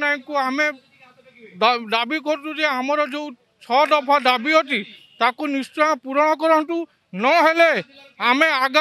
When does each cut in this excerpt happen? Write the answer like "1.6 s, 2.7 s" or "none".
none

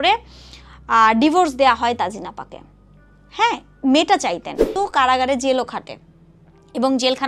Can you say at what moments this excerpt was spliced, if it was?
4.7 s

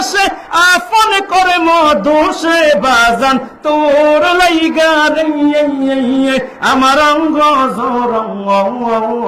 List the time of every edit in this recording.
none

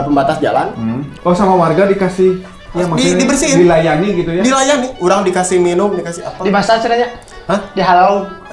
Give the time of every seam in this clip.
1.1 s

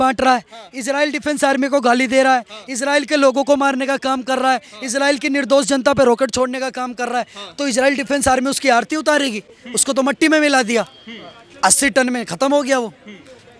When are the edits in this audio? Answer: none

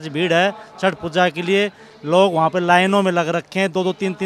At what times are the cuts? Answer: none

